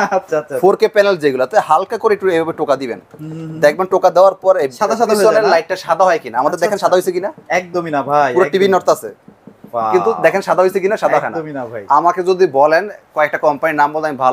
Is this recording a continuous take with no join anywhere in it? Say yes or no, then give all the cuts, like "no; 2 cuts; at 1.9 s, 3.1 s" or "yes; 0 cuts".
yes; 0 cuts